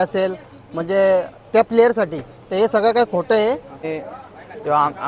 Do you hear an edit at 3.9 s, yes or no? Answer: yes